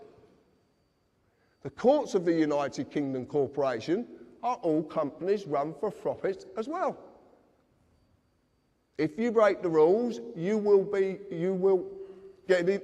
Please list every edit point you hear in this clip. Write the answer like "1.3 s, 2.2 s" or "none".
none